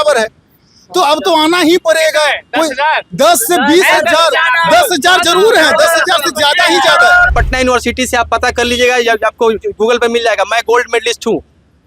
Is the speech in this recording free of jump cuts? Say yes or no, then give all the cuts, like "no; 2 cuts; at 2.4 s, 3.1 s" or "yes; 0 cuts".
no; 1 cut; at 7.3 s